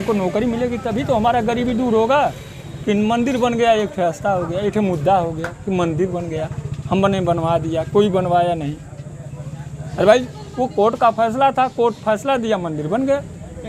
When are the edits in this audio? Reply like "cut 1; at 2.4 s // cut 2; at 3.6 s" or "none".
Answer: none

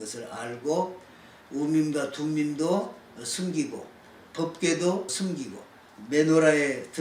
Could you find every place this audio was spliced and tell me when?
cut 1; at 4.2 s // cut 2; at 5.4 s

